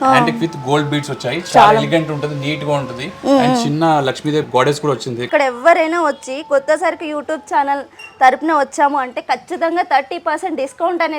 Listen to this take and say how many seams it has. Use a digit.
1